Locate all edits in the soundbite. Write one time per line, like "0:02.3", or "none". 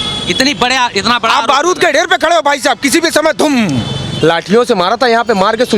0:04.0